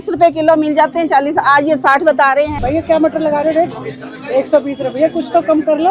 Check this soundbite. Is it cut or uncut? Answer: cut